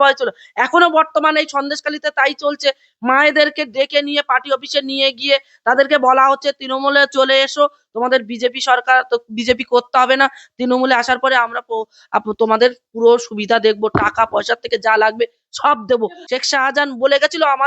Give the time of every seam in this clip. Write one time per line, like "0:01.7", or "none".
0:16.2